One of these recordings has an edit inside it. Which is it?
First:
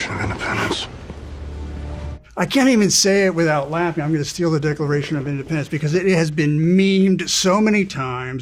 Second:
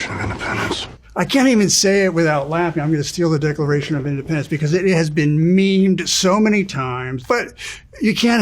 second; 2 cuts; at 1.0 s, 7.1 s

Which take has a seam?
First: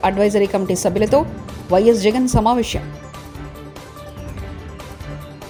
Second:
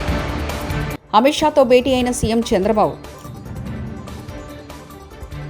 second; 1 cut; at 1.0 s

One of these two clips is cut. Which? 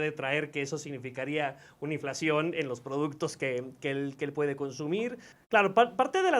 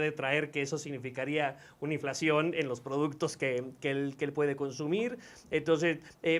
first; 1 cut; at 5.3 s

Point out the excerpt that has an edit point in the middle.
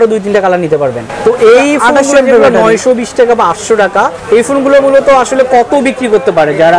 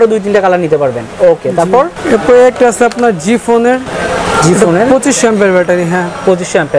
first; 2 cuts; at 1.1 s, 4.2 s

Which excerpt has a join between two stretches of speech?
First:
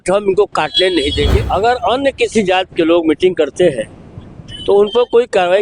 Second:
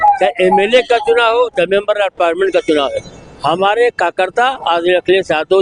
first; 1 cut; at 1.4 s

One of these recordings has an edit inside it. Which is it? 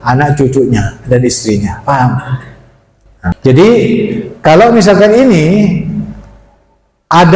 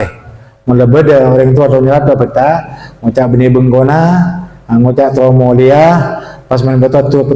first; 1 cut; at 3.4 s

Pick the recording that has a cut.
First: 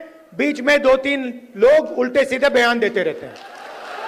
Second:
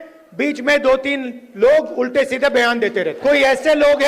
second; 1 cut; at 3.2 s

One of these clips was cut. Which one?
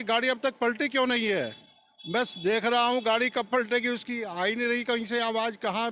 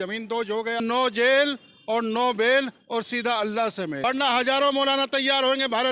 second; 2 cuts; at 0.8 s, 4.0 s

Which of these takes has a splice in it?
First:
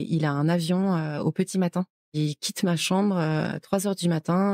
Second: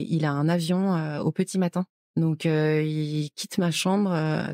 first; 1 cut; at 2.1 s

